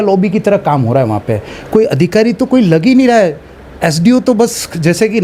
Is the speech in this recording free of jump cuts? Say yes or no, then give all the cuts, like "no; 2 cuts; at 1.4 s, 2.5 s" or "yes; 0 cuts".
yes; 0 cuts